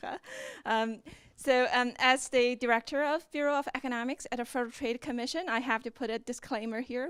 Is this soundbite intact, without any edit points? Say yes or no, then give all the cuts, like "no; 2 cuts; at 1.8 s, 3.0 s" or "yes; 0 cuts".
yes; 0 cuts